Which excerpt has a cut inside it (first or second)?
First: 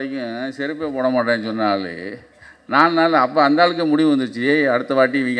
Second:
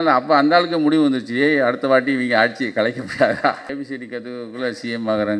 second